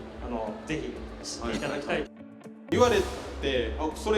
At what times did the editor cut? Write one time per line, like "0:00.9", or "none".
0:02.7

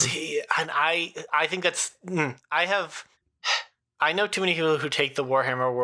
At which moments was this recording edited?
none

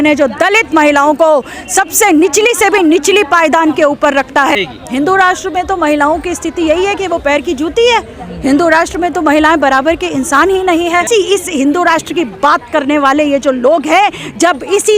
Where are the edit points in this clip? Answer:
0:04.5
0:11.1

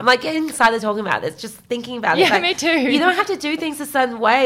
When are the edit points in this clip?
none

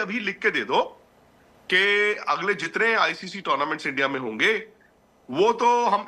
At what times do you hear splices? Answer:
none

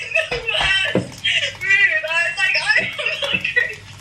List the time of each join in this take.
none

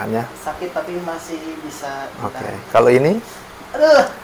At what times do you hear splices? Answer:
none

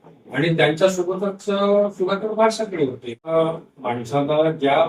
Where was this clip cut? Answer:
0:03.3

